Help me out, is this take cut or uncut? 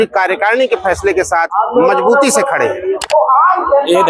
cut